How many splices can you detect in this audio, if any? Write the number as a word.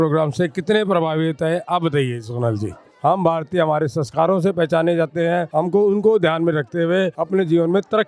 three